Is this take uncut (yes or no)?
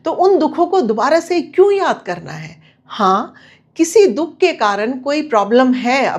yes